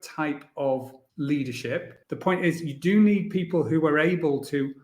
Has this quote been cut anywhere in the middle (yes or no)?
yes